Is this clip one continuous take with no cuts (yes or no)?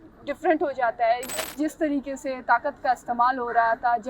no